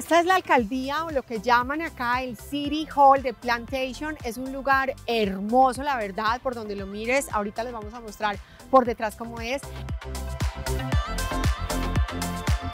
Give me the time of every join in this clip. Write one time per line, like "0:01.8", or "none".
none